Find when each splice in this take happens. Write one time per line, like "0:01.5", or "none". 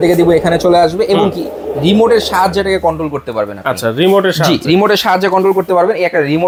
none